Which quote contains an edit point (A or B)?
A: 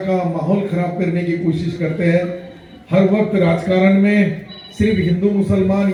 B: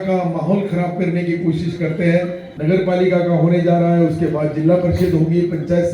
B